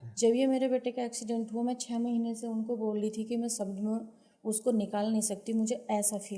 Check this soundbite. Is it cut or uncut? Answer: uncut